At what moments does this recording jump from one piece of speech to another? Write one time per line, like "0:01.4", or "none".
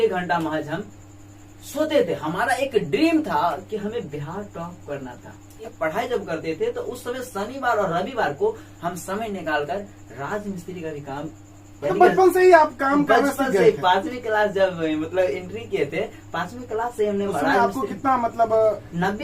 0:05.6